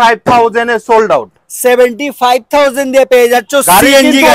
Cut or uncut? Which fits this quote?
uncut